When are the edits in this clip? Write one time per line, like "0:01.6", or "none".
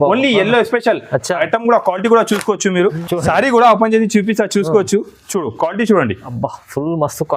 0:03.0